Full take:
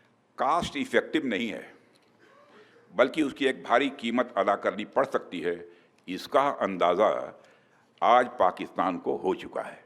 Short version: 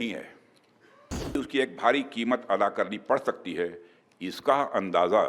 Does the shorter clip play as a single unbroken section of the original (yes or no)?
no